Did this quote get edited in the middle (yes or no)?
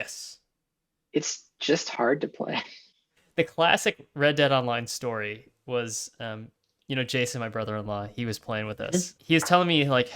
yes